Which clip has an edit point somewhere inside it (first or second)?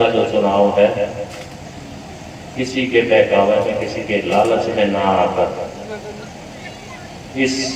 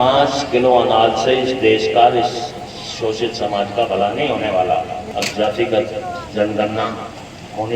second